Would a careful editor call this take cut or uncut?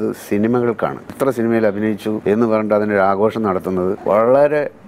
cut